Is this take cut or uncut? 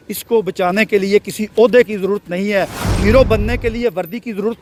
uncut